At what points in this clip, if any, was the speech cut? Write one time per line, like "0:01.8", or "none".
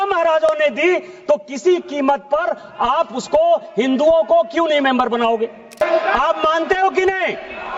0:05.8